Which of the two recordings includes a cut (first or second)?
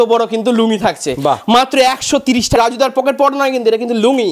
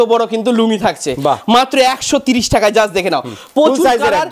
first